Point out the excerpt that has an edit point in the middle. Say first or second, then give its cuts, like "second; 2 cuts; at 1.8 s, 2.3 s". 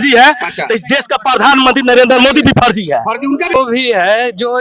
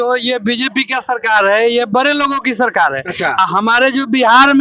first; 1 cut; at 3.5 s